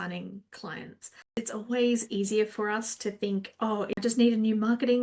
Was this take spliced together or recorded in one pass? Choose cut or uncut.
cut